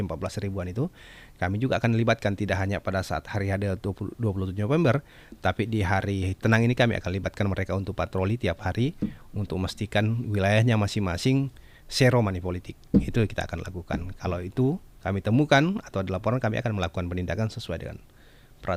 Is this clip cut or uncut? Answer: uncut